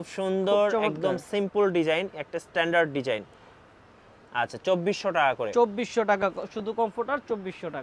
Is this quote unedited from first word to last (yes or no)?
yes